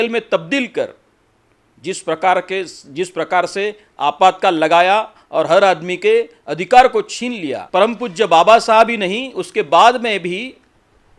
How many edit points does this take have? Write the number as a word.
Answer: one